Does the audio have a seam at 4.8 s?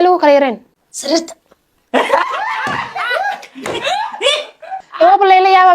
yes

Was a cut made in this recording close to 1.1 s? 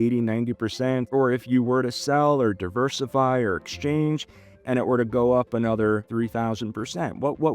yes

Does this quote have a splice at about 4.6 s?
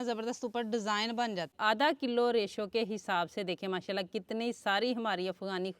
no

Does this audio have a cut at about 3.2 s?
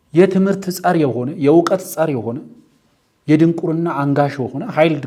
no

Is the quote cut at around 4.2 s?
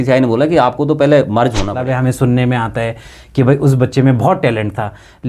no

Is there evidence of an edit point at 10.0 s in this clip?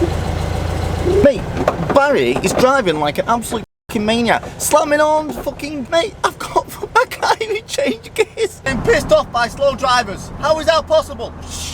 no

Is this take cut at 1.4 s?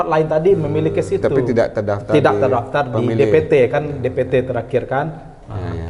yes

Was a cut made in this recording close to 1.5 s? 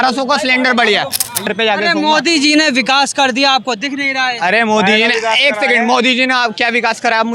yes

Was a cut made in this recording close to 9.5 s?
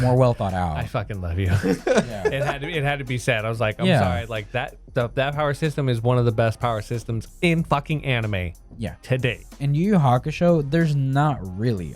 yes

